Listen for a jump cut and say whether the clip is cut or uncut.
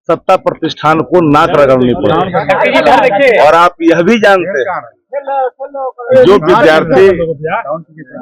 uncut